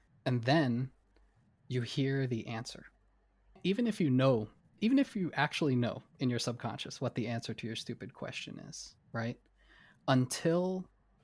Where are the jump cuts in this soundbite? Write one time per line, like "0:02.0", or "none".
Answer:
0:03.6
0:04.6